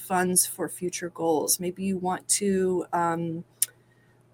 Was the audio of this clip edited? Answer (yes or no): no